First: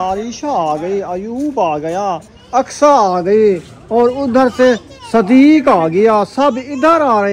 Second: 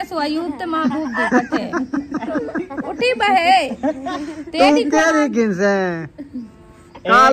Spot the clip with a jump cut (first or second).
first